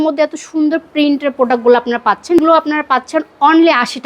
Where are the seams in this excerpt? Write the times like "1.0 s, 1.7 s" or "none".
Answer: 2.4 s